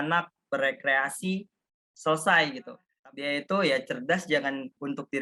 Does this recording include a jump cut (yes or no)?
yes